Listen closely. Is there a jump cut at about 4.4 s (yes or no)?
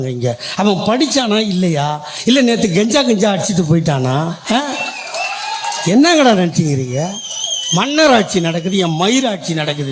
yes